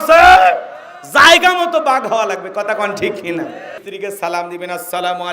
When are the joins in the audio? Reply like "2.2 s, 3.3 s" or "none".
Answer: 3.8 s